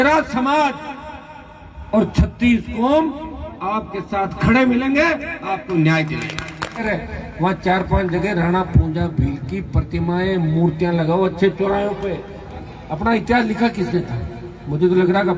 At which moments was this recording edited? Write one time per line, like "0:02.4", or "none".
0:06.8
0:12.5